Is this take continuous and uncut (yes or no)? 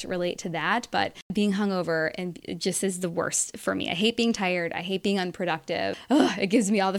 no